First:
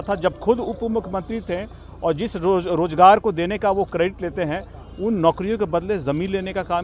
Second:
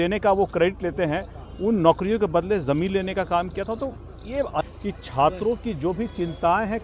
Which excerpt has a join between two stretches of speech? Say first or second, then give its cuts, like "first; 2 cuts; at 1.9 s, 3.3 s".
second; 1 cut; at 4.6 s